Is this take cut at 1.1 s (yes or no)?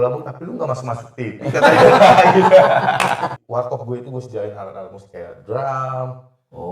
no